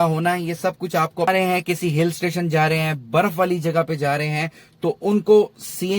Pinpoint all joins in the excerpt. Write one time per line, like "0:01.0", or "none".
0:01.3